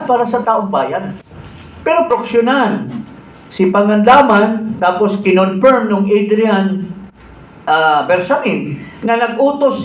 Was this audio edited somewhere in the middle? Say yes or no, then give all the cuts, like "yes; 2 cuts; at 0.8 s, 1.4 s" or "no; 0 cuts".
yes; 1 cut; at 2.1 s